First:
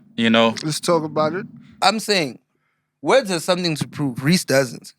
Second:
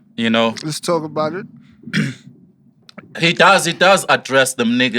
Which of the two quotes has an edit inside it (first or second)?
first